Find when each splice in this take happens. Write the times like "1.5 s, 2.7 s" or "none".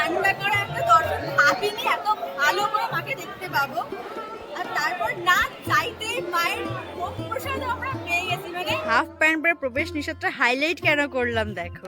8.8 s

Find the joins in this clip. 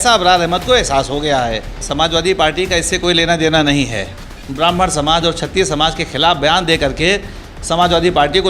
1.8 s, 4.4 s

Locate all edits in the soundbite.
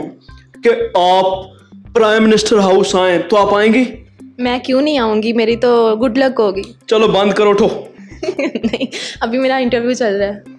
none

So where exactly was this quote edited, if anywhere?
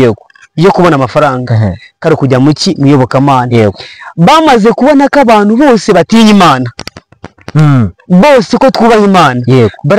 none

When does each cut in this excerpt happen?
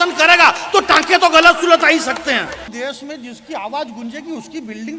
2.7 s

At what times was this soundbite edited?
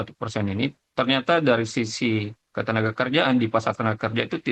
none

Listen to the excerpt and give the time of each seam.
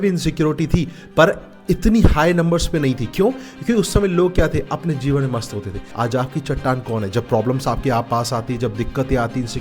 5.8 s

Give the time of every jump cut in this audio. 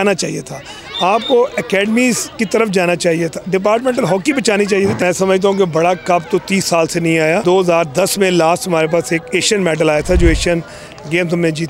5.0 s, 7.4 s

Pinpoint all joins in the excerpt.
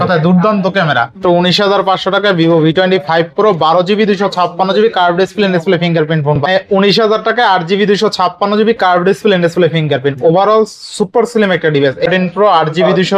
1.2 s, 6.4 s, 12.1 s

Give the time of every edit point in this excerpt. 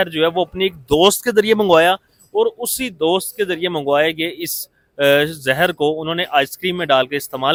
none

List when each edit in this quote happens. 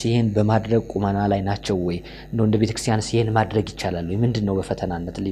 none

